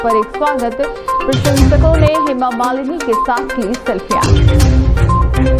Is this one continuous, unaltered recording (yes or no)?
yes